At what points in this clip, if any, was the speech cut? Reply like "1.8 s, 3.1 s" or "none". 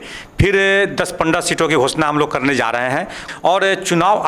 3.2 s